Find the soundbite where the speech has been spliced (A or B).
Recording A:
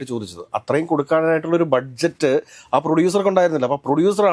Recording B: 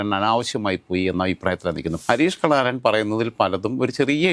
B